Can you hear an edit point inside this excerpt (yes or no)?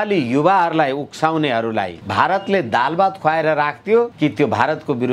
yes